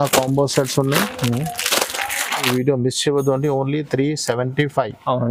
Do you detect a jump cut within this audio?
no; 0 cuts

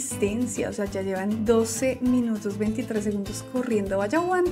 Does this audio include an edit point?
no; 0 cuts

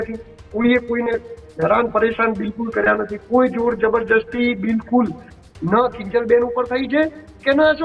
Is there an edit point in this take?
no; 0 cuts

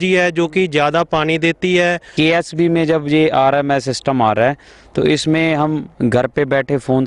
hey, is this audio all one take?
no; 1 cut; at 2.1 s

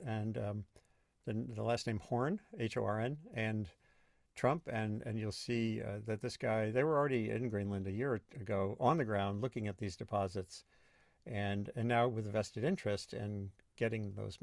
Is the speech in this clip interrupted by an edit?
no; 0 cuts

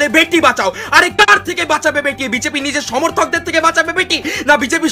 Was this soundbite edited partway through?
no; 0 cuts

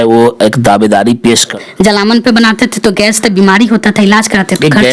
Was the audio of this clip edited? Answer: yes; 1 cut; at 1.5 s

